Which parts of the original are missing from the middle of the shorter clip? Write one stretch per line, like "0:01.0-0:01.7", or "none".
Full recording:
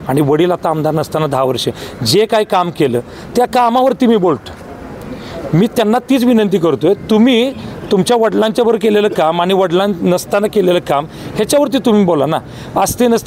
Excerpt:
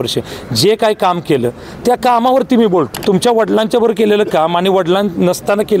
0:04.4-0:07.8